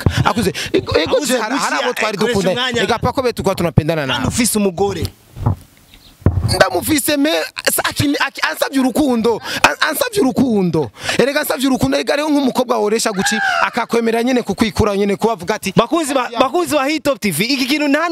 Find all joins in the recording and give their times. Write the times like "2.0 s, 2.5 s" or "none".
none